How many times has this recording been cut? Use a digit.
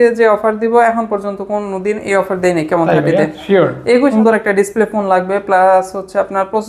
1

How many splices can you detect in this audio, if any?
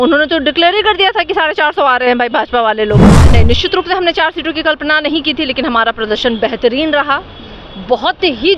1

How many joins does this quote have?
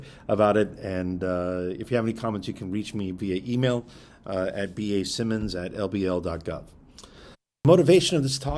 1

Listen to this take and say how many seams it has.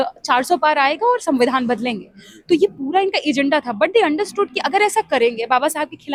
0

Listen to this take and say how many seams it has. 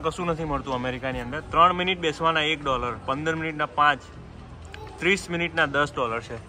0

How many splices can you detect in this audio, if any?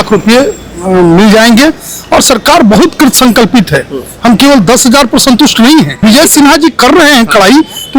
1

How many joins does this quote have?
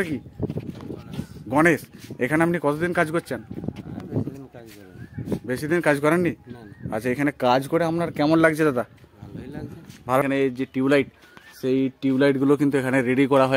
1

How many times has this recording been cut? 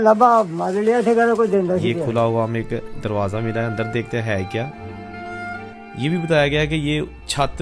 2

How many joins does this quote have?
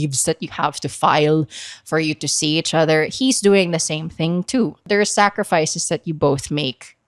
1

